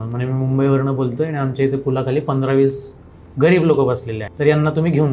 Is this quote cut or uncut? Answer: cut